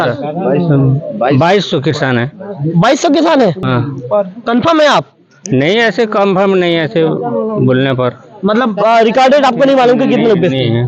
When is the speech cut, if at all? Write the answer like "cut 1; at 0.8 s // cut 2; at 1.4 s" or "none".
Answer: none